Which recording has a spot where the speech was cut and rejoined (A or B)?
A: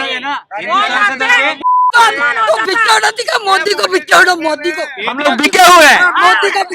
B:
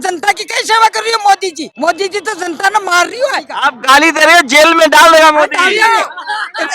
B